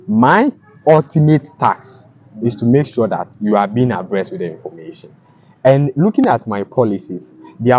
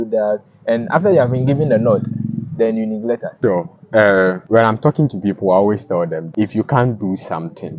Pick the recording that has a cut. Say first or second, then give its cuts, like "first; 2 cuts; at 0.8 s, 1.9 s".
second; 3 cuts; at 3.3 s, 4.4 s, 6.3 s